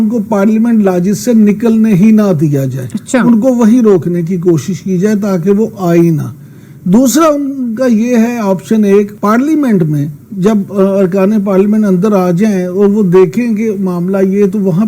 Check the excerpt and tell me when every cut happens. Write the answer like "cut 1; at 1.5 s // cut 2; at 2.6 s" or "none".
cut 1; at 9.1 s